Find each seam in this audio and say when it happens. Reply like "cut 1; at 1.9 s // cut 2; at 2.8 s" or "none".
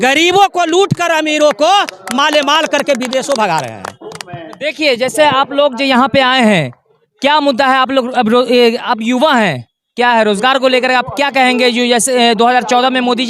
none